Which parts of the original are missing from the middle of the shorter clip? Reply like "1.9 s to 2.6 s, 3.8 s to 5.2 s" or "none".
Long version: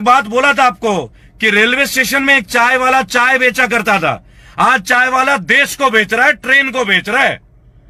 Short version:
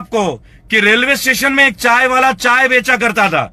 none